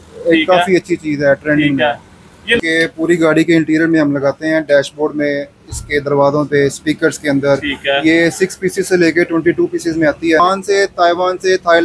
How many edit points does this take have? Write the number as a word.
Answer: two